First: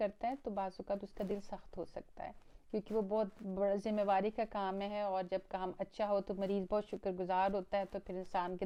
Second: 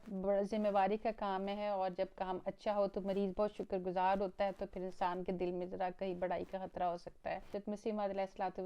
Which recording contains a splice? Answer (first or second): second